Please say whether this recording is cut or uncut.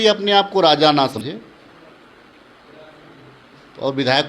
cut